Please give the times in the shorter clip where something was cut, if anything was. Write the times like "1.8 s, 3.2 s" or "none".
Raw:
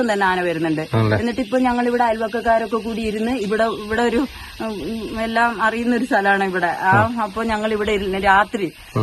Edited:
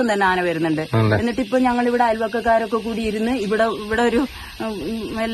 none